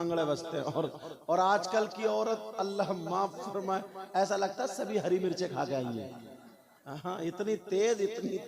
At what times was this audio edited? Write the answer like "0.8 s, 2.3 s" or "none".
none